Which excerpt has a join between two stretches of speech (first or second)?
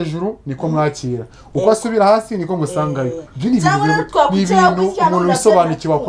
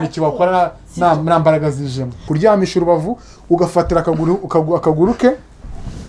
second